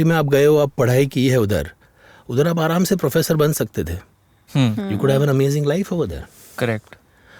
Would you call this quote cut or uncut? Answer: uncut